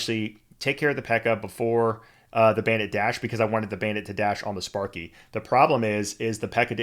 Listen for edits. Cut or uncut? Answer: uncut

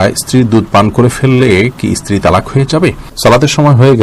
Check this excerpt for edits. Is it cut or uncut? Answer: cut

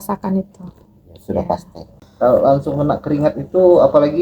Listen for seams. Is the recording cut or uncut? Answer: cut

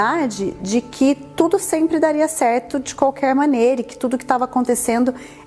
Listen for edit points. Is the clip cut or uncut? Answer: uncut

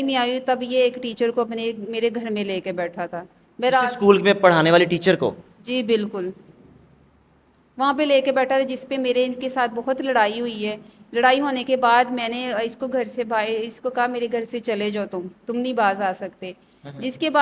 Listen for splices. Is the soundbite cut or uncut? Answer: uncut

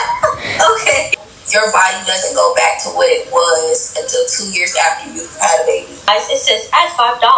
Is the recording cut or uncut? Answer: cut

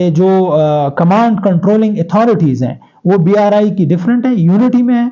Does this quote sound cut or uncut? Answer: uncut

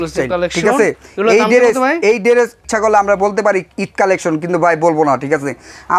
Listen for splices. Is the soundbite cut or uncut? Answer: cut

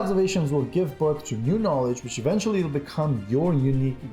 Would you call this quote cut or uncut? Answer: uncut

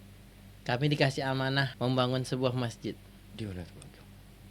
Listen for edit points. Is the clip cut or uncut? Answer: cut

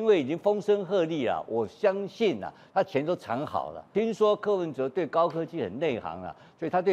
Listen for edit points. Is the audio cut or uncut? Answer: cut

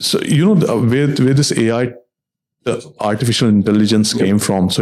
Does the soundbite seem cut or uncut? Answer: uncut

